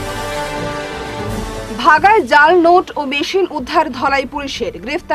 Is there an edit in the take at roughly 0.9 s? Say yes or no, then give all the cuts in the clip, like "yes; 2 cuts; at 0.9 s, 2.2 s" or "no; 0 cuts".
yes; 1 cut; at 0.9 s